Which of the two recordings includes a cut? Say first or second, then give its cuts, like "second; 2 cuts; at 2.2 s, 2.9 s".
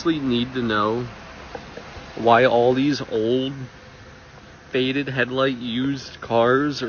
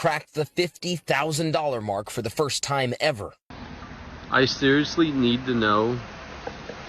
second; 1 cut; at 3.4 s